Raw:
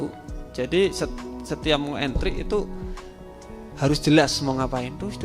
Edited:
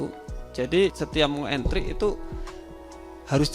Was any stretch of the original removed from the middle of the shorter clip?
yes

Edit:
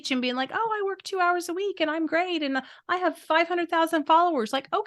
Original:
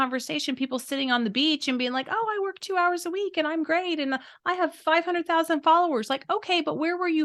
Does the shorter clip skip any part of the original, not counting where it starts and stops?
no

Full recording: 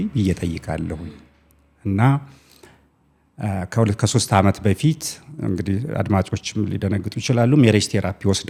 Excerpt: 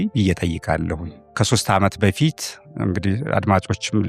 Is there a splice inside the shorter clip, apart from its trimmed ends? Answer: yes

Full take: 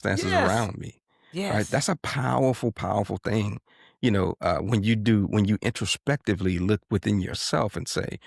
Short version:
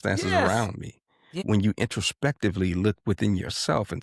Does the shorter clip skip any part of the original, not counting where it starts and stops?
yes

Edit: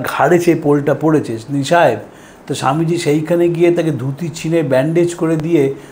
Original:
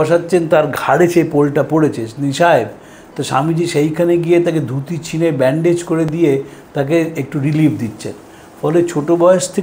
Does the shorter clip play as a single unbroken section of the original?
yes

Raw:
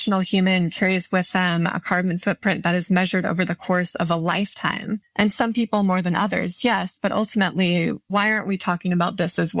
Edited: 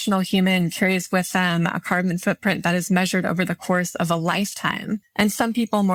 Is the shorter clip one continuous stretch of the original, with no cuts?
yes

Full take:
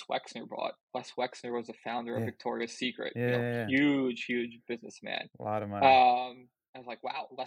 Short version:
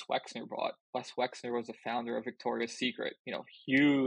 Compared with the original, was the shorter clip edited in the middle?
no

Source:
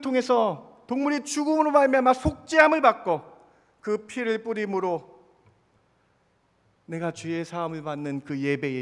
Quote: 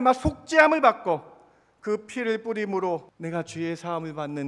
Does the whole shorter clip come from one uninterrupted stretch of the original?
no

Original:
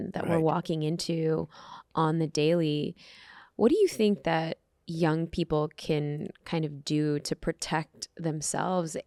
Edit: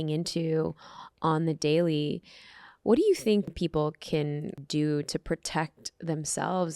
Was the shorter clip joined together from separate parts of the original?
yes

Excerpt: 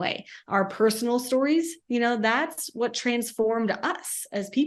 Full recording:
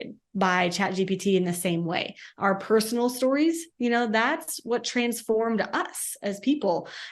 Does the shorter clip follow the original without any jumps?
yes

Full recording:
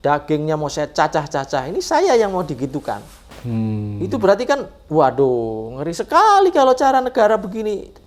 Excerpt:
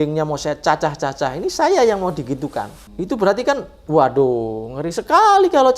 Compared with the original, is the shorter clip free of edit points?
no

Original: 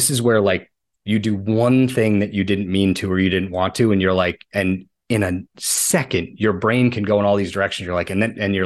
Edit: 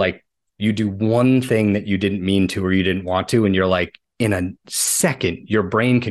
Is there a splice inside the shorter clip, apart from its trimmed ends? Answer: yes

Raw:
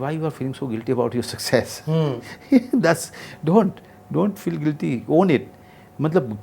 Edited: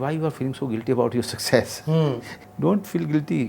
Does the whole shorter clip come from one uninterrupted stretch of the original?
no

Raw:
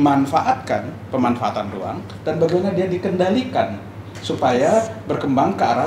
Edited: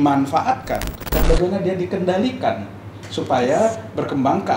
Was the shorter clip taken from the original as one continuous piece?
no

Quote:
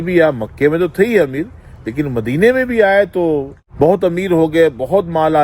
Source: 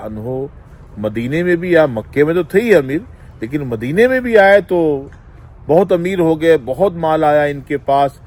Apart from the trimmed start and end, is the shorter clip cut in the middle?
yes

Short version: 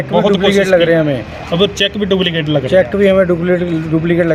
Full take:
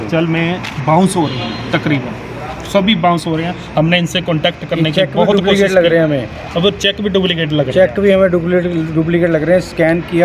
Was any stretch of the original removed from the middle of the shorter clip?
no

